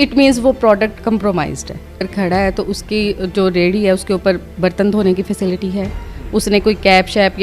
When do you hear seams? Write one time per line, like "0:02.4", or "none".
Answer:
0:02.1